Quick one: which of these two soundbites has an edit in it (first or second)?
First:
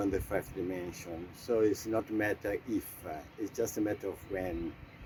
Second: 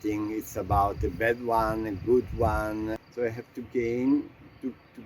second